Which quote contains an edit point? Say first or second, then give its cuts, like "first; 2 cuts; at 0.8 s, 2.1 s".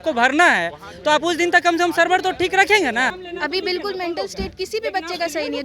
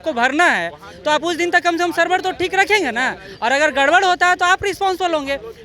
first; 1 cut; at 3.2 s